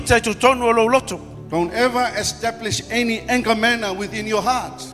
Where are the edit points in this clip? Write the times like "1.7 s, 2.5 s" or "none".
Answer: none